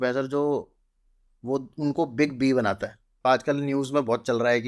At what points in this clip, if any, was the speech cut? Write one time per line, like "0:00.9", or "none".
0:03.2